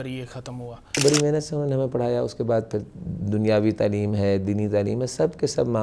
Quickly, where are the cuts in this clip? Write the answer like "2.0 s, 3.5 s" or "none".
1.0 s